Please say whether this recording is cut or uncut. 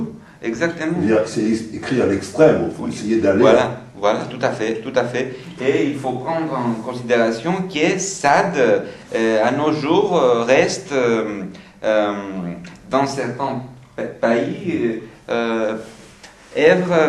uncut